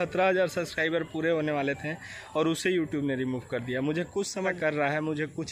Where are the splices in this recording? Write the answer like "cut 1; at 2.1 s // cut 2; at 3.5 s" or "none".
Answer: cut 1; at 4.6 s